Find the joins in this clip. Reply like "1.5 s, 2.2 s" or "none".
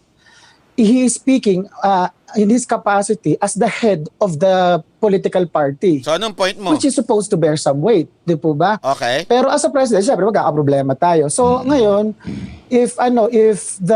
none